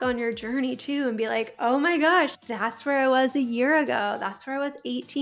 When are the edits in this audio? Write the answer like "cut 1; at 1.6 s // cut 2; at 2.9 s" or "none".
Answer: cut 1; at 2.3 s